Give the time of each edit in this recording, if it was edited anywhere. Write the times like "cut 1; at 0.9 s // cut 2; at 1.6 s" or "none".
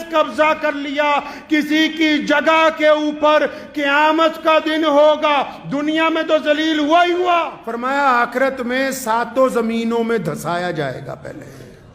cut 1; at 7.6 s